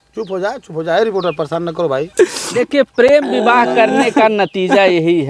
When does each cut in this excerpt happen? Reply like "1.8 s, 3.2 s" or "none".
none